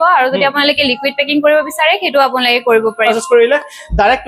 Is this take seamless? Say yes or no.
no